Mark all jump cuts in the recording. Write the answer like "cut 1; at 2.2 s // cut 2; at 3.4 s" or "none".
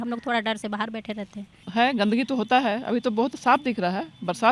cut 1; at 1.5 s